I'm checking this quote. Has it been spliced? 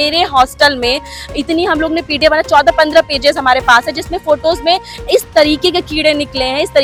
no; 0 cuts

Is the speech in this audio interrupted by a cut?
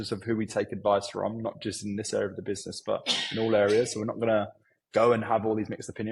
no; 0 cuts

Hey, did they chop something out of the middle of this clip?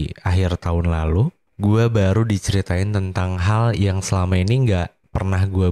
yes; 1 cut; at 1.4 s

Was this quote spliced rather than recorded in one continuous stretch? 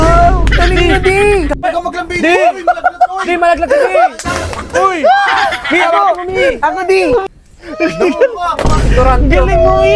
yes; 2 cuts; at 1.6 s, 7.3 s

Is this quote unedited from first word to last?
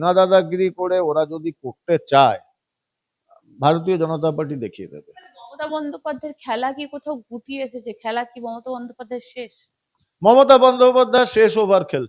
yes; 0 cuts

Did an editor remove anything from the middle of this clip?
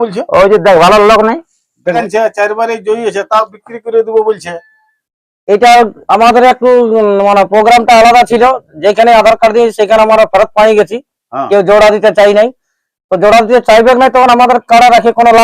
yes; 1 cut; at 2.0 s

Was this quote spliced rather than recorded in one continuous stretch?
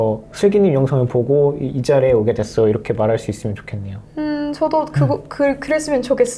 no; 0 cuts

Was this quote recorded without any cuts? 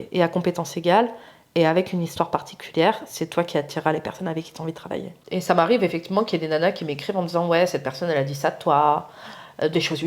no; 1 cut; at 5.1 s

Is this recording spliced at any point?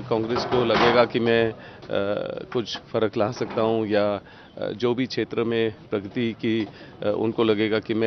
no; 0 cuts

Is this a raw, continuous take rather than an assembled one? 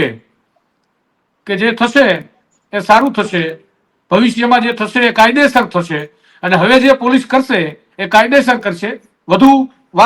yes; 0 cuts

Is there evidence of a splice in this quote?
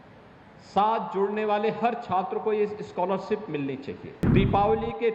yes; 1 cut; at 4.1 s

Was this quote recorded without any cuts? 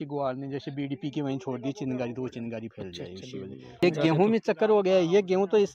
no; 1 cut; at 3.8 s

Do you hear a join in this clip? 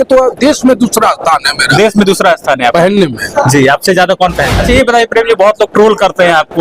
yes; 1 cut; at 4.6 s

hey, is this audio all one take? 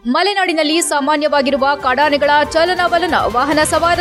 yes; 0 cuts

